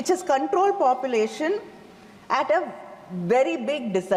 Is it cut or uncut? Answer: uncut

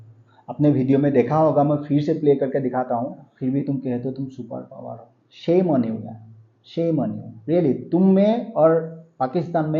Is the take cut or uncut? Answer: cut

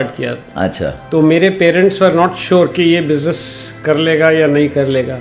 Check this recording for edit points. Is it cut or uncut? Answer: uncut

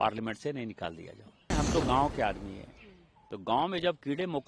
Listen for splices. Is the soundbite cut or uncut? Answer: cut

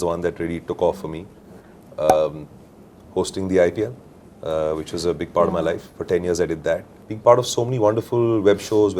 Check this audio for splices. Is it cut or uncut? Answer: uncut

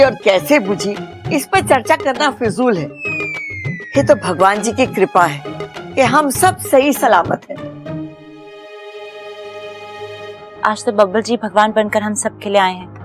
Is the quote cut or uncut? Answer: uncut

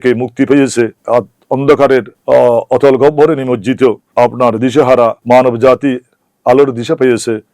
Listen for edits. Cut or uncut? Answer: cut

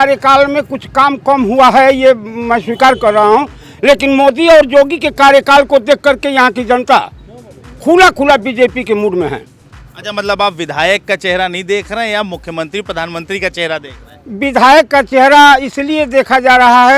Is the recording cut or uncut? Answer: uncut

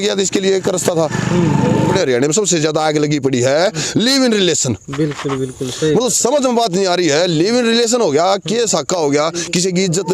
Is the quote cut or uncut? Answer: cut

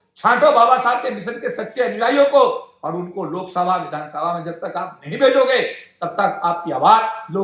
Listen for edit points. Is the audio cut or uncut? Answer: uncut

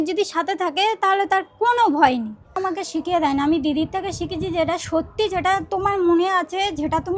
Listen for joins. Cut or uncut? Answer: cut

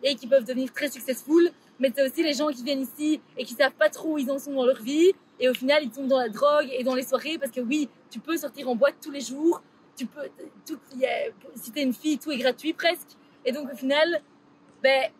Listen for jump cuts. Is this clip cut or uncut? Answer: uncut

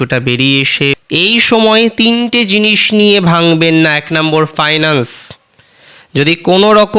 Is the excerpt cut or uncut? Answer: cut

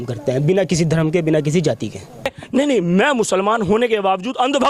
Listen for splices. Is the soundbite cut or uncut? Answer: cut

